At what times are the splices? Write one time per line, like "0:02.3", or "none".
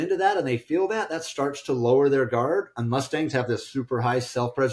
none